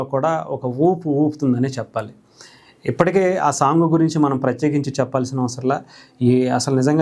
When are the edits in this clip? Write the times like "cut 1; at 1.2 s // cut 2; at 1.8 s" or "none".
none